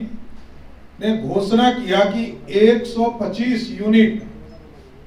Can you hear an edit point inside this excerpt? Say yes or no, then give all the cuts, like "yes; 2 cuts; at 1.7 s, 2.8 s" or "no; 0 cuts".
no; 0 cuts